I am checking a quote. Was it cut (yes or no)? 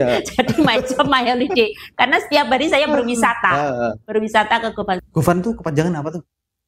yes